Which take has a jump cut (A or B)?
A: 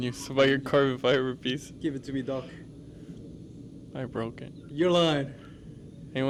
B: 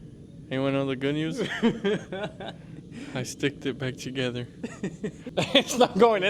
B